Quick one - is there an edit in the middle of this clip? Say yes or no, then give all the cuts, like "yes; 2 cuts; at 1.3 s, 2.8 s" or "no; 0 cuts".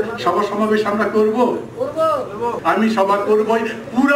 yes; 1 cut; at 2.6 s